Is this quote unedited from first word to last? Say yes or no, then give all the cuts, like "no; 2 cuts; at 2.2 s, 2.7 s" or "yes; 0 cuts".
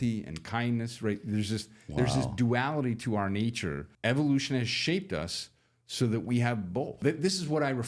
no; 2 cuts; at 3.9 s, 7.0 s